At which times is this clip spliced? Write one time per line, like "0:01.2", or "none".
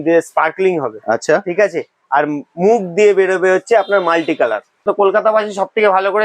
0:04.8

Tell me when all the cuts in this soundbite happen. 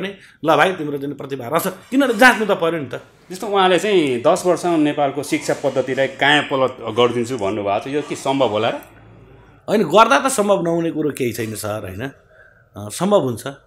none

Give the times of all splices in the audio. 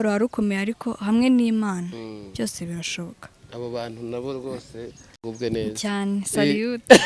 none

